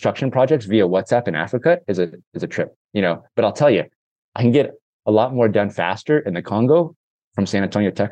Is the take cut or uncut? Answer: uncut